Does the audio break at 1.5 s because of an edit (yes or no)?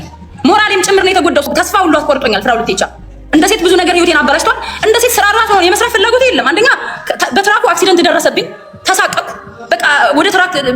yes